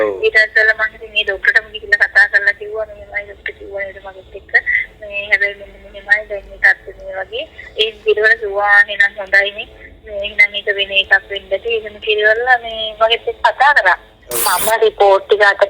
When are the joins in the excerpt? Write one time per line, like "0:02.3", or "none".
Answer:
0:14.4